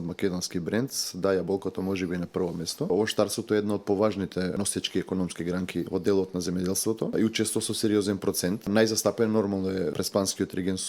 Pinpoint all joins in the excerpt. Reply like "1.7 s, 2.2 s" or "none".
2.9 s, 4.6 s, 5.9 s, 7.1 s, 8.7 s, 9.9 s